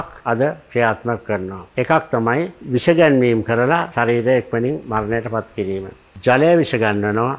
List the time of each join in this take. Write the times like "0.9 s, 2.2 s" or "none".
1.6 s, 2.6 s, 3.9 s

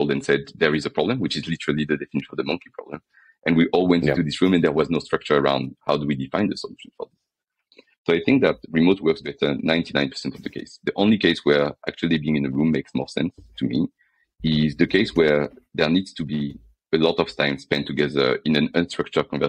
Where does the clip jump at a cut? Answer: none

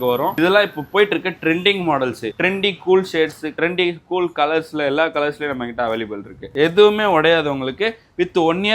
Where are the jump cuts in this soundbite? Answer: 2.3 s, 6.5 s

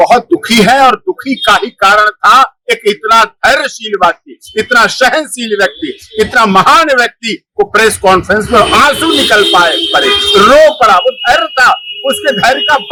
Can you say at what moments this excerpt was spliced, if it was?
none

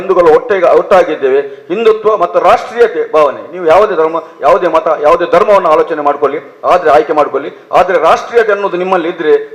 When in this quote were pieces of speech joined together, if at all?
none

